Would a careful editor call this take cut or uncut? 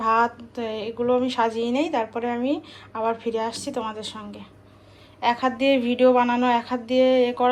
uncut